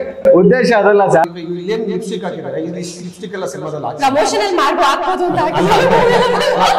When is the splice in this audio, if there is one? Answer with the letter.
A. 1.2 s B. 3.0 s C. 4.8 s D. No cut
A